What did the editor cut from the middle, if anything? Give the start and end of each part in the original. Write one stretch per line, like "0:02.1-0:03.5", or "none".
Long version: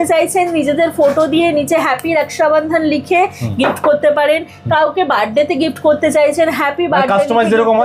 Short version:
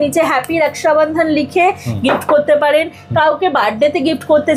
none